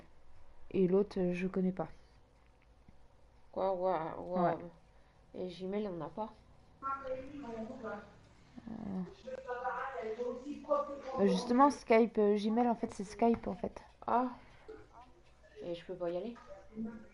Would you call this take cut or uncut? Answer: uncut